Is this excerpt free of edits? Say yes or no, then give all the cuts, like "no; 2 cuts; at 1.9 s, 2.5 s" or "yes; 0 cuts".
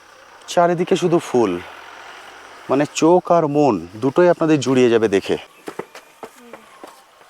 no; 1 cut; at 5.6 s